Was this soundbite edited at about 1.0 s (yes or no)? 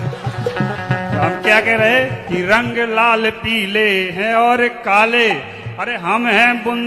no